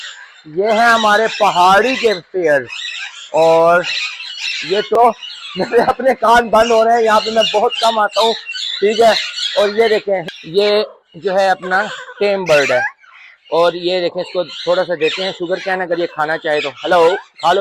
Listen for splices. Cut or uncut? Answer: cut